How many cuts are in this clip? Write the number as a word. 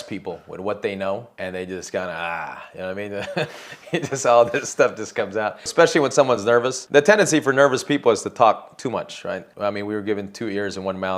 four